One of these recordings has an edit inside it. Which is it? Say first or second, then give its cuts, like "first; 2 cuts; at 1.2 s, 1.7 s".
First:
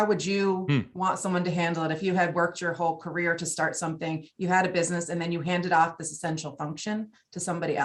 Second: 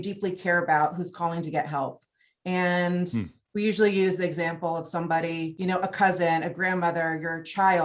second; 1 cut; at 5.5 s